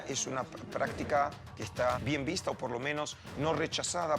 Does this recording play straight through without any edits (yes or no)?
no